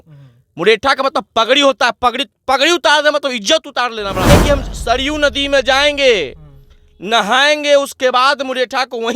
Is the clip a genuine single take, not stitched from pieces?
no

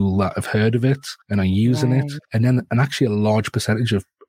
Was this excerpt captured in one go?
no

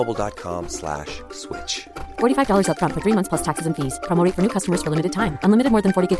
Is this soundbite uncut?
yes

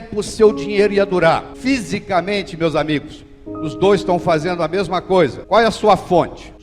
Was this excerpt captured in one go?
no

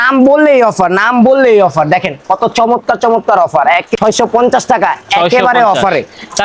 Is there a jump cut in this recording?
yes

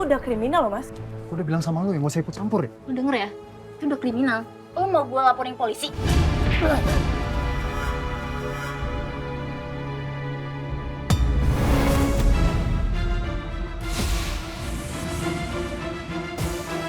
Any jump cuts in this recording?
yes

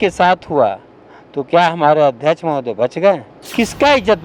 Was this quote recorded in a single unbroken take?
no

